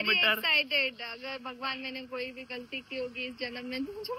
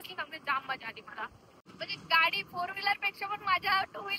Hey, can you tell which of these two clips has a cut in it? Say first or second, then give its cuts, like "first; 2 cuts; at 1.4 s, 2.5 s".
second; 1 cut; at 1.7 s